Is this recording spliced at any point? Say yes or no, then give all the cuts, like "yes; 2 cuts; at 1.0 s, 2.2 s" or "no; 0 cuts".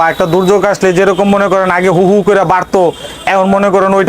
no; 0 cuts